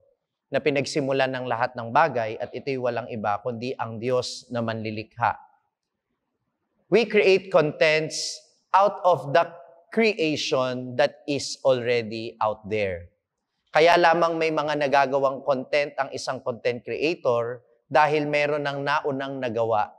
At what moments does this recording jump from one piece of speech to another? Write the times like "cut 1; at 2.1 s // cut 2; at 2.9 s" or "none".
none

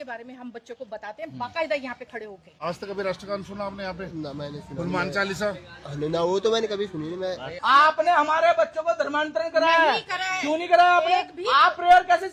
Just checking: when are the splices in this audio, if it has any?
none

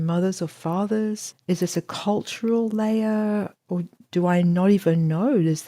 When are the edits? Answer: cut 1; at 1.3 s

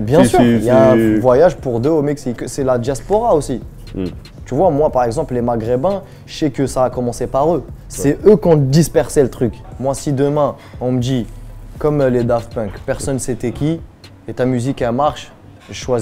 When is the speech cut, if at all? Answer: cut 1; at 2.4 s // cut 2; at 9.6 s

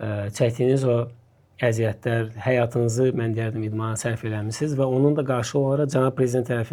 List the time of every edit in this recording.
none

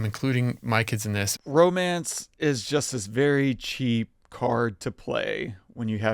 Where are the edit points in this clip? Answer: cut 1; at 1.3 s

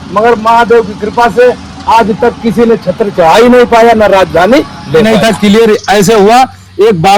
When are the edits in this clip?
cut 1; at 5.0 s

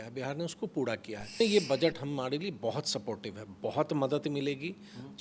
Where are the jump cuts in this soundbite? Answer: cut 1; at 1.4 s

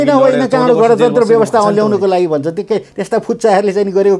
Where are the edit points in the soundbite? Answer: none

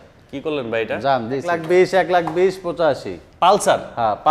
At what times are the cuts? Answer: cut 1; at 1.5 s

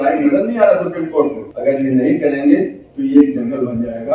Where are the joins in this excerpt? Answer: cut 1; at 1.5 s

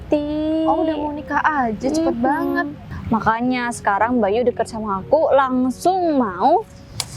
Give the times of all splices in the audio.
cut 1; at 2.8 s

